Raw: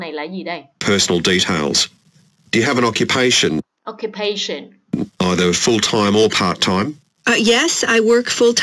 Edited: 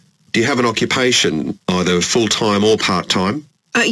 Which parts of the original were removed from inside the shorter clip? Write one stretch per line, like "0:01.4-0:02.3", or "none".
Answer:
0:03.7-0:05.0